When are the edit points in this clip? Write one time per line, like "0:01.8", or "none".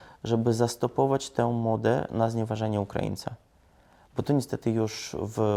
none